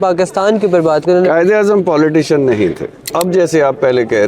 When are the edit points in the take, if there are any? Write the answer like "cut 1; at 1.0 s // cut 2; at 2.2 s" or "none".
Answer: cut 1; at 3.0 s